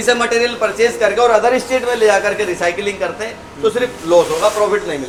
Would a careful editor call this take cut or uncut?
uncut